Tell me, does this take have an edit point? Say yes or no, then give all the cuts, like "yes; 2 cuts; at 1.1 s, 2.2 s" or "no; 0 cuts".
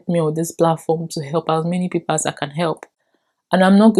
no; 0 cuts